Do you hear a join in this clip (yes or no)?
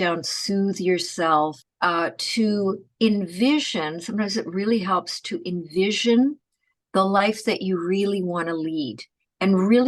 yes